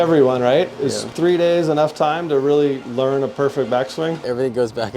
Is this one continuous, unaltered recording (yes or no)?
no